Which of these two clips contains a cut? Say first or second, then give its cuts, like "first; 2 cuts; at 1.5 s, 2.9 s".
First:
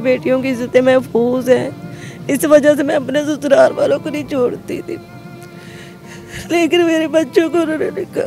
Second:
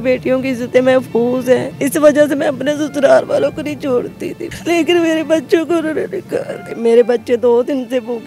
second; 3 cuts; at 1.7 s, 4.5 s, 6.8 s